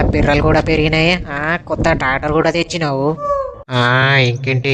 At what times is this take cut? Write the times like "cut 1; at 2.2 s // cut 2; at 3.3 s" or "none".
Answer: cut 1; at 3.2 s